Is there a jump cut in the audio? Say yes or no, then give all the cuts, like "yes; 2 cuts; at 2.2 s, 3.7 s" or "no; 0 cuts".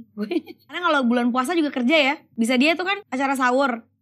yes; 3 cuts; at 0.8 s, 2.2 s, 3.0 s